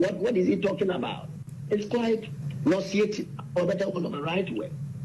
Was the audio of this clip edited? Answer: yes; 2 cuts; at 1.5 s, 2.4 s

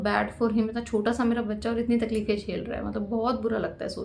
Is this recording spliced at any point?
no; 0 cuts

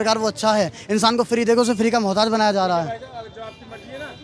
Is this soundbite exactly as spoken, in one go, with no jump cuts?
yes; 0 cuts

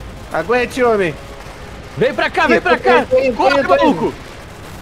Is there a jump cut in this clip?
no; 0 cuts

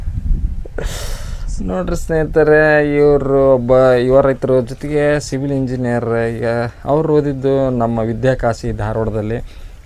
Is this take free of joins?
yes; 0 cuts

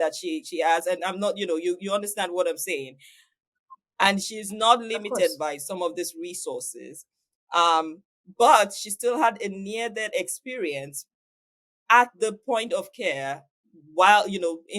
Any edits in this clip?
no; 0 cuts

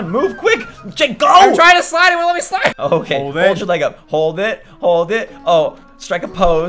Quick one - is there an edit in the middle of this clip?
yes; 1 cut; at 2.8 s

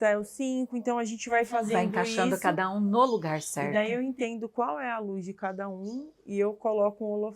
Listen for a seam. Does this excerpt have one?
no; 0 cuts

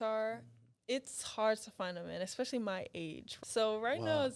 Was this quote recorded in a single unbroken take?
no; 1 cut; at 3.3 s

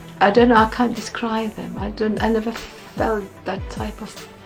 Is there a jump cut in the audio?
no; 0 cuts

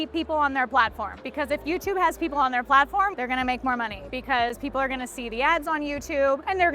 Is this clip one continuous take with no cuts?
yes; 0 cuts

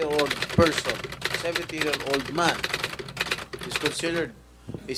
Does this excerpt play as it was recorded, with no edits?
yes; 0 cuts

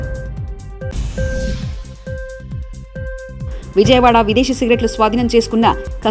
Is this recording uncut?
yes; 0 cuts

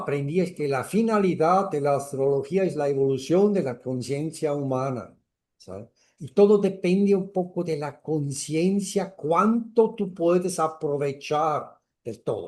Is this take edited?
no; 0 cuts

